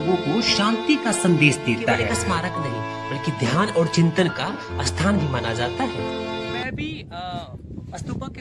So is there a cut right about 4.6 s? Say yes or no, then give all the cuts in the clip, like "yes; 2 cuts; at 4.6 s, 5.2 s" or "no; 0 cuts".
no; 2 cuts; at 2.2 s, 6.6 s